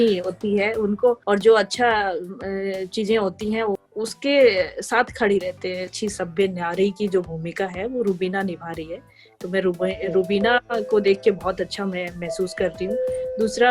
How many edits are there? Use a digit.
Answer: 3